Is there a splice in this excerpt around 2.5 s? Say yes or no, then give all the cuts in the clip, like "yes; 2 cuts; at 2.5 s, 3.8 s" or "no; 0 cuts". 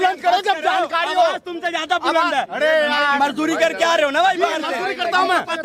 no; 0 cuts